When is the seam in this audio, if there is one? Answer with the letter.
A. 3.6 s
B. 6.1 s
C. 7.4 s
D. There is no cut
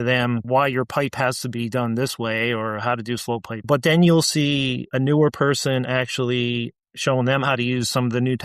A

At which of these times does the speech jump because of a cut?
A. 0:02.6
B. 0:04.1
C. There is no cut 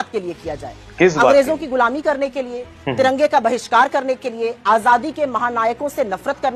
C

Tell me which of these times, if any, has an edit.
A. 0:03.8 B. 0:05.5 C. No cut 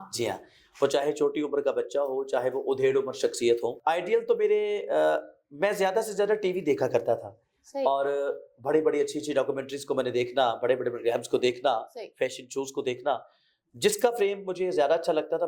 A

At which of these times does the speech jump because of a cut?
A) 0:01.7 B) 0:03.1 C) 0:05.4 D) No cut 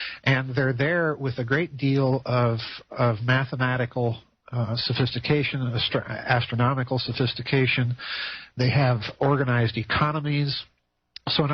C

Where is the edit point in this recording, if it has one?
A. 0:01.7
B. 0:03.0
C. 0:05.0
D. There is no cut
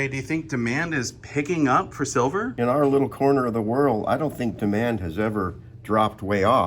D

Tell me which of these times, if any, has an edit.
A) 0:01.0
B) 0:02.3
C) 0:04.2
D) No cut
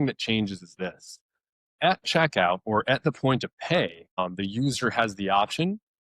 C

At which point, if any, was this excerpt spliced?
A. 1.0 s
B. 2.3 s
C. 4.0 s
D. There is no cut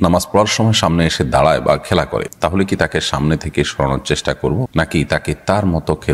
D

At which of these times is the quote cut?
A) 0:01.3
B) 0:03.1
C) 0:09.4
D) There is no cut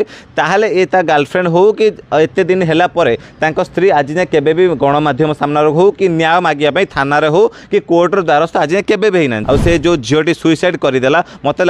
C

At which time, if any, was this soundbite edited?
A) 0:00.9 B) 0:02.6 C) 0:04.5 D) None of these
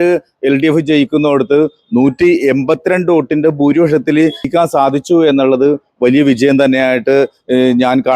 C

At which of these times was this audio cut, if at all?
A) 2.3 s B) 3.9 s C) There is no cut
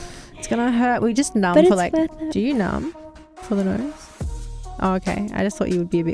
A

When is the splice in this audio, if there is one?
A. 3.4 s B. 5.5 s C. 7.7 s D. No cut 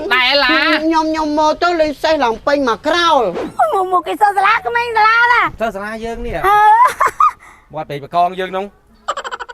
A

